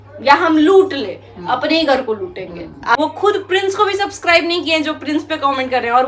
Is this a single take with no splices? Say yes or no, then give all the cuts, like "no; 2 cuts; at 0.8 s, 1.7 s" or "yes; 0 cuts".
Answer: no; 1 cut; at 3.0 s